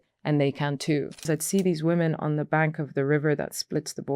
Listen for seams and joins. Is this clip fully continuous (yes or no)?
no